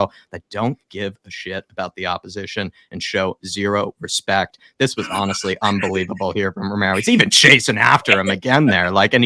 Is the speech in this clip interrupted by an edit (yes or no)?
no